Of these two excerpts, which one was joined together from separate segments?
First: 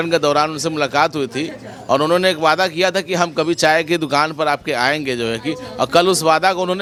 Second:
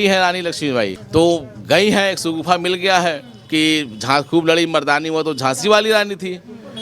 second; 1 cut; at 1.0 s

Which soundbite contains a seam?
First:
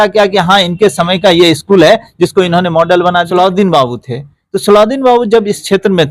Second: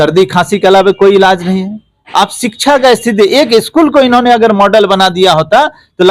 first; 1 cut; at 3.3 s

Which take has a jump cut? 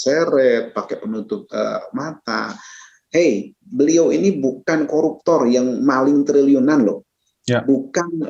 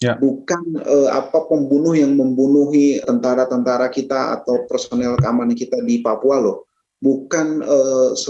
second; 1 cut; at 3.0 s

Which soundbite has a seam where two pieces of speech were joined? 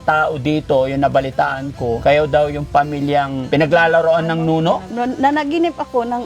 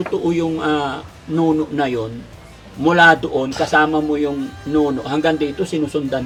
first; 3 cuts; at 2.0 s, 3.4 s, 4.9 s

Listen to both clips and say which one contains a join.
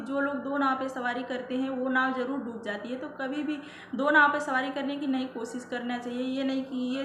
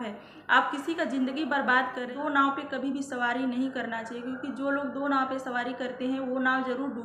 second; 1 cut; at 2.1 s

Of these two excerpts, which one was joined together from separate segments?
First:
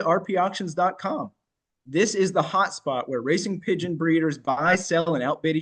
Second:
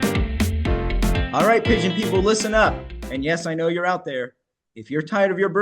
second; 1 cut; at 1.1 s

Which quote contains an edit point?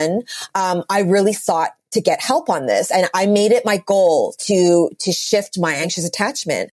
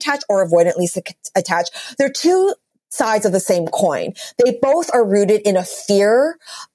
first; 1 cut; at 5.9 s

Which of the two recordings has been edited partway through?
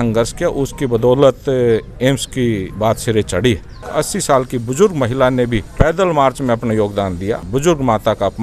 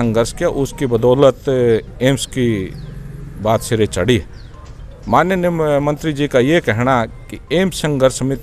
first; 4 cuts; at 2.7 s, 3.9 s, 5.6 s, 7.4 s

